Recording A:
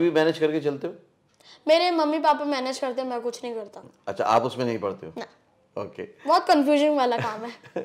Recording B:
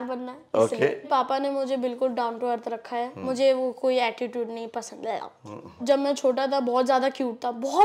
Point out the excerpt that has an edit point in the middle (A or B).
B